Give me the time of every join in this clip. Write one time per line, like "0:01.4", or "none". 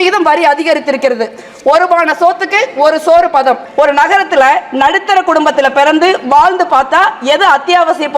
0:03.6